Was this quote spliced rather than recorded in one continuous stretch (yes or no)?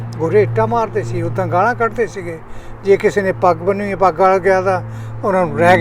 no